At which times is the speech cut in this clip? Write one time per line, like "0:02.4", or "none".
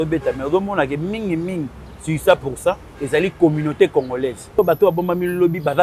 0:04.6